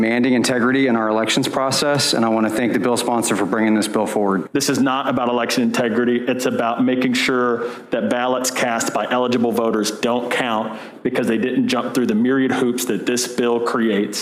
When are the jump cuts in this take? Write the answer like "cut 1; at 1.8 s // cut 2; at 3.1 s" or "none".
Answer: cut 1; at 4.5 s